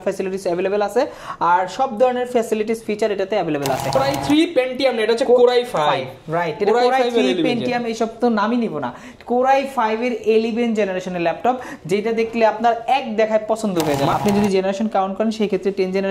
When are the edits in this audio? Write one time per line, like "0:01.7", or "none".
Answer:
0:03.9
0:14.1

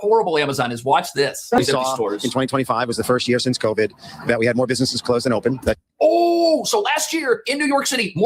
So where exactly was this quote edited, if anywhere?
0:01.6

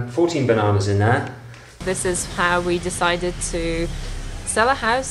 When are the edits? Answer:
0:01.8

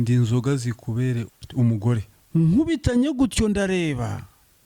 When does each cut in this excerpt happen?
0:01.3
0:02.1

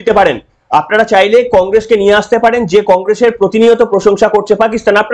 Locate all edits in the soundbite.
none

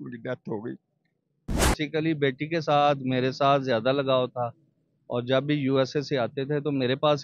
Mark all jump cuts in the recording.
0:01.7

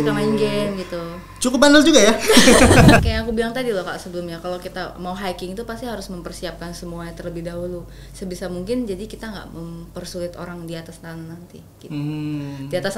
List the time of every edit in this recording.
0:03.1

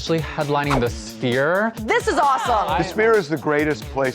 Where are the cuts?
0:02.8

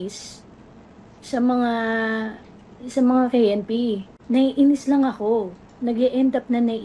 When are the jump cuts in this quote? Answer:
0:04.1

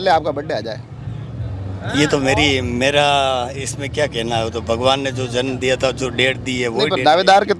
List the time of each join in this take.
none

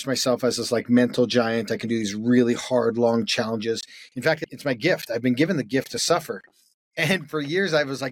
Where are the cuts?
0:04.5

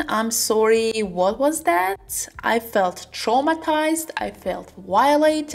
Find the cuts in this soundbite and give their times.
none

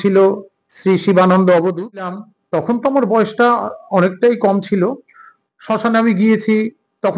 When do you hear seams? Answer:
0:02.3

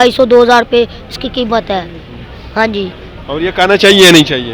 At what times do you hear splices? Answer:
none

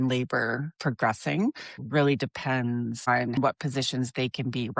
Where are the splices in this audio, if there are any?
0:01.8
0:03.3

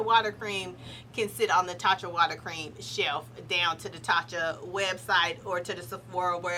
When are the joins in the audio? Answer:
none

